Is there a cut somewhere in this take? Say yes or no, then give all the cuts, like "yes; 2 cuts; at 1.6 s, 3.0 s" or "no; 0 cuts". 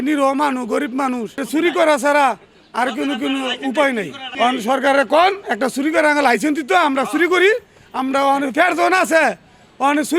no; 0 cuts